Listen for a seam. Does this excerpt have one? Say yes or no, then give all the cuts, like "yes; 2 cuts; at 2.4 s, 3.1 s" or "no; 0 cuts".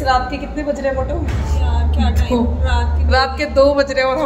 no; 0 cuts